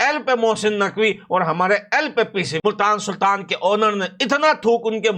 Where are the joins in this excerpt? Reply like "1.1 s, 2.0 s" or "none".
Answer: 2.6 s